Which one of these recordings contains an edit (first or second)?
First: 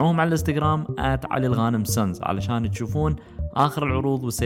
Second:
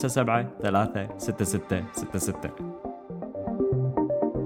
second